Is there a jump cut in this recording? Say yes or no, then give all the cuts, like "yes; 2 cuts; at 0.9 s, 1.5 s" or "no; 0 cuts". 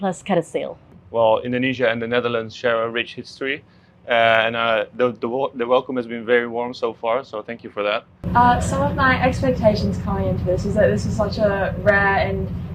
yes; 2 cuts; at 1.0 s, 8.2 s